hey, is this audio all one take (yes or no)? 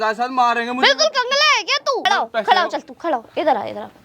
no